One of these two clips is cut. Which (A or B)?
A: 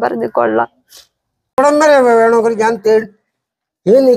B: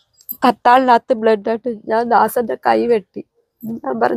A